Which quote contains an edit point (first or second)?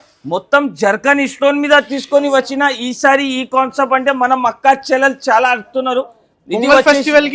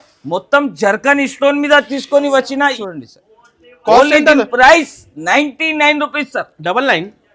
second